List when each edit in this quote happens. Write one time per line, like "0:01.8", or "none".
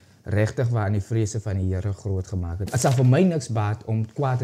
0:02.7